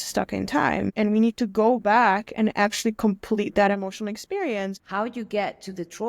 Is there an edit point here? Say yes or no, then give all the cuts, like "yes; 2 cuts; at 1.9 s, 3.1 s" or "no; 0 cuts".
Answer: yes; 2 cuts; at 0.9 s, 4.8 s